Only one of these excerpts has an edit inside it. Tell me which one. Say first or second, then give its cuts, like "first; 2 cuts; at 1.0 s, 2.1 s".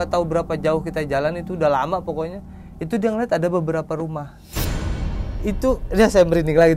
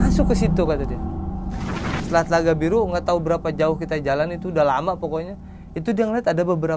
second; 1 cut; at 1.9 s